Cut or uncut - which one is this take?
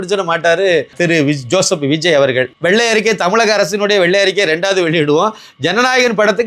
cut